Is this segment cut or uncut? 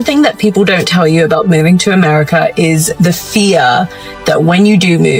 uncut